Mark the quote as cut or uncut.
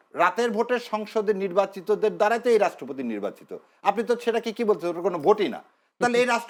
uncut